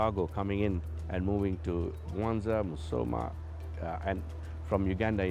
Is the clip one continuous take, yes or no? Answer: yes